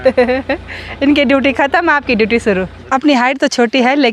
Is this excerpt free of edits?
no; 1 cut; at 2.7 s

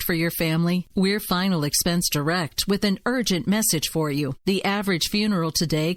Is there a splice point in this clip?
no; 0 cuts

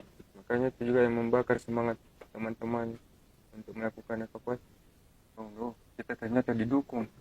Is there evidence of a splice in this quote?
yes; 1 cut; at 5.4 s

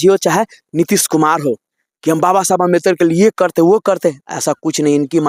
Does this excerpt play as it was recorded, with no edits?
yes; 0 cuts

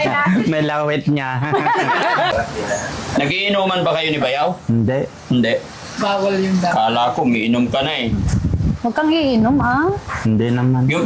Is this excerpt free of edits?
no; 1 cut; at 2.3 s

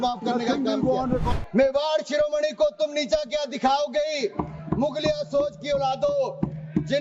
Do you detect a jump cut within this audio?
yes; 1 cut; at 1.3 s

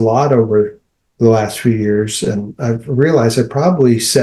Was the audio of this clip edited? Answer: no; 0 cuts

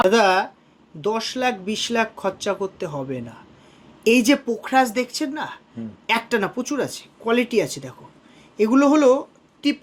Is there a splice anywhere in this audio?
no; 0 cuts

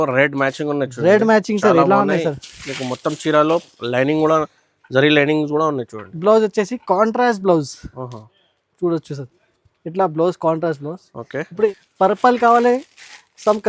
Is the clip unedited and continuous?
no; 1 cut; at 11.7 s

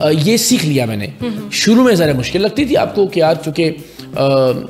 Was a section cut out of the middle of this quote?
no; 0 cuts

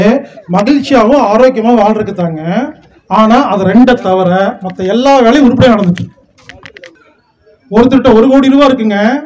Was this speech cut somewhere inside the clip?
yes; 1 cut; at 7.0 s

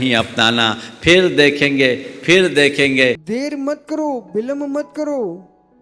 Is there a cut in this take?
yes; 1 cut; at 3.2 s

